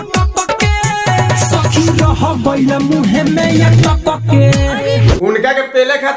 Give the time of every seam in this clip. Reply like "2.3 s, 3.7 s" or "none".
4.9 s